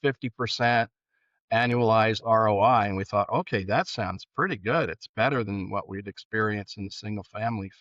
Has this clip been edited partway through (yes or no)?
no